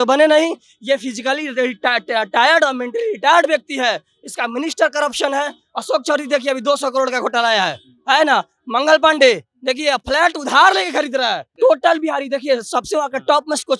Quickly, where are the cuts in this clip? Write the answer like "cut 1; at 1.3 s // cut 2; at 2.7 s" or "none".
cut 1; at 11.5 s